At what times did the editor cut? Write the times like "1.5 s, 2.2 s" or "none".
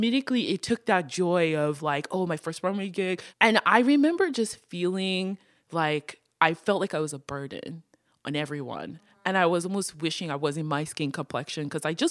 none